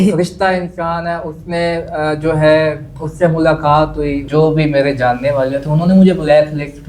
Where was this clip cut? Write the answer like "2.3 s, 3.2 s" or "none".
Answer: 4.2 s